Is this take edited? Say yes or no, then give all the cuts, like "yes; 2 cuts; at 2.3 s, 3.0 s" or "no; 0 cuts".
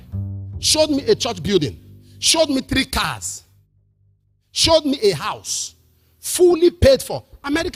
no; 0 cuts